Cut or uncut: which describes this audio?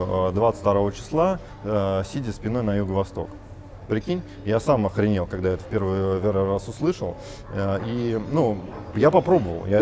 uncut